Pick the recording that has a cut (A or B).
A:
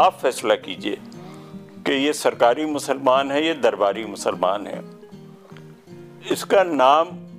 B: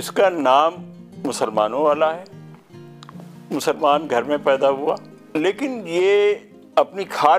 B